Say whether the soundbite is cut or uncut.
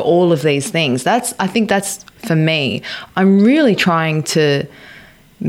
cut